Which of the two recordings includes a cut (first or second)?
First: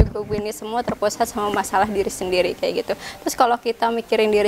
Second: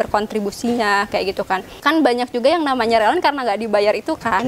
second